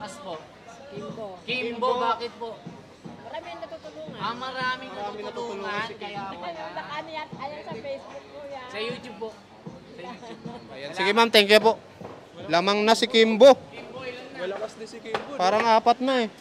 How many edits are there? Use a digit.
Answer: 0